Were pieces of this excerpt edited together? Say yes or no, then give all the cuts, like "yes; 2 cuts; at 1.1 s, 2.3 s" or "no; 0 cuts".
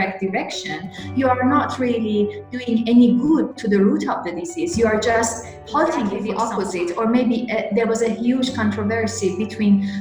yes; 1 cut; at 6.2 s